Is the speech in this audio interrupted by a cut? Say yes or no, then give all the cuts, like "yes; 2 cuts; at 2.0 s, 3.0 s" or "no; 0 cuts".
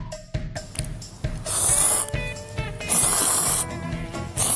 no; 0 cuts